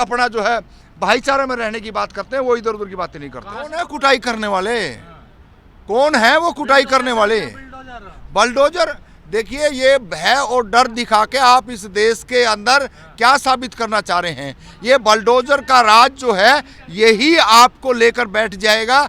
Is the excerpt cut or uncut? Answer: cut